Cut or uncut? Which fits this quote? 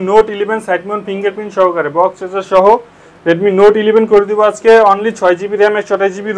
uncut